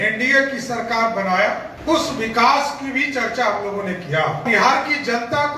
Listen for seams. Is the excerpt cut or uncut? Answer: cut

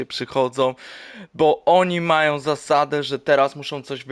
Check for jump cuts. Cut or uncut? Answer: uncut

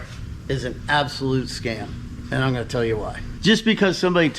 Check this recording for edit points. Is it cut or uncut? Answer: cut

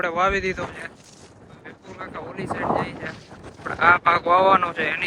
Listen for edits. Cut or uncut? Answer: uncut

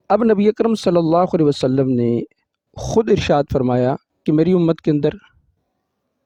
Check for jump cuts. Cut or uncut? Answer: uncut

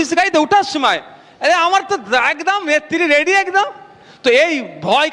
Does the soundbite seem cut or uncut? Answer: uncut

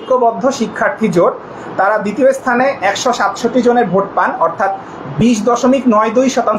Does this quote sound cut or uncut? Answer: uncut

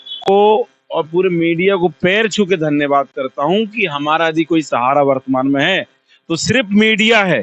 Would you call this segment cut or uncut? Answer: uncut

